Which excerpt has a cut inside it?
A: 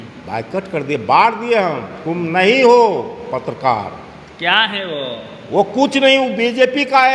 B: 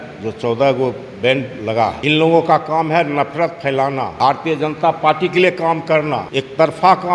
B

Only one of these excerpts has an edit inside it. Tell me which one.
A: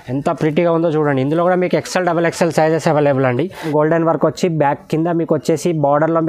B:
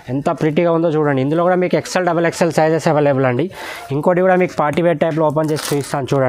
A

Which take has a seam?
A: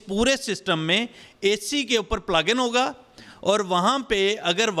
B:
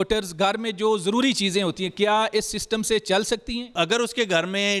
B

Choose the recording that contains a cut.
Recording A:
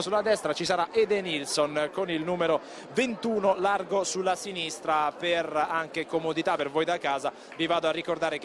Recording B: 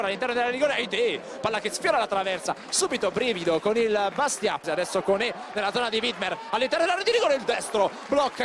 A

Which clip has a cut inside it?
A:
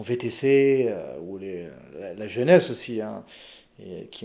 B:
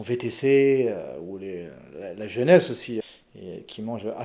B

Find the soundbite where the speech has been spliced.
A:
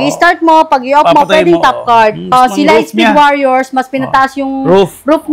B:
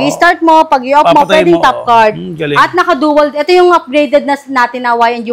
A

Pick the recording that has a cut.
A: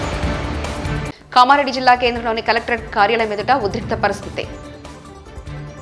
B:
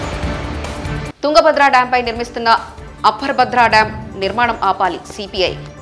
A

